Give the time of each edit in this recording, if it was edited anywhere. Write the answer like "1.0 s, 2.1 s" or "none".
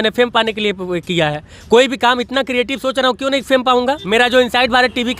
4.0 s

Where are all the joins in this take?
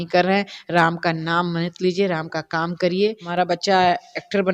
3.2 s

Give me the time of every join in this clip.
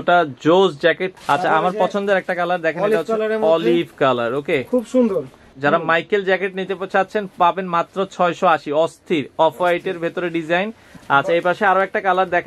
1.1 s, 5.5 s, 10.9 s

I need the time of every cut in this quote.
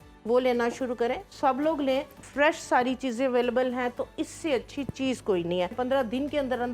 2.2 s, 5.8 s

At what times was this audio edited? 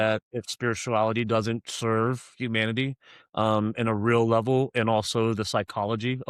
none

